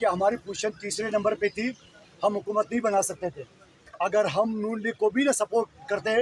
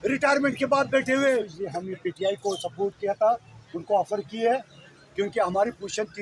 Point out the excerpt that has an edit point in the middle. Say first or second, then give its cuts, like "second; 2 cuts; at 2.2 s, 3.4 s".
second; 1 cut; at 1.6 s